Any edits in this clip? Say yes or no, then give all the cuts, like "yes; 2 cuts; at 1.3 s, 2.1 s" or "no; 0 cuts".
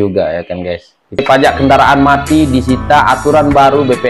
yes; 1 cut; at 1.2 s